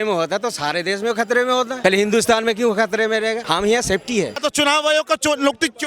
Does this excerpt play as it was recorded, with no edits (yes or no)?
no